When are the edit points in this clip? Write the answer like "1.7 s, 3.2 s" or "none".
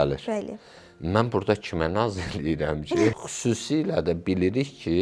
3.1 s